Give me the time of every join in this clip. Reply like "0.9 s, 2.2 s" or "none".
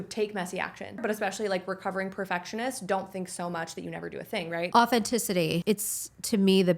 1.0 s, 4.7 s, 5.6 s